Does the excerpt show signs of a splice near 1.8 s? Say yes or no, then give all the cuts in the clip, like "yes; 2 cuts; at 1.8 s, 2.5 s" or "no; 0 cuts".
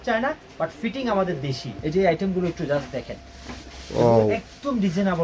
yes; 1 cut; at 1.8 s